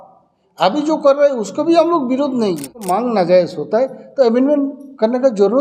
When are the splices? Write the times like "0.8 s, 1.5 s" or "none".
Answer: 2.9 s